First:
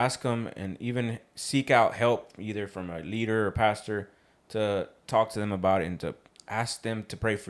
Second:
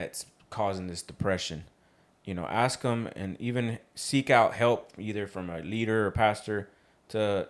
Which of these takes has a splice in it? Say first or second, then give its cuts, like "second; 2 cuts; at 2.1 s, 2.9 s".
first; 1 cut; at 6.3 s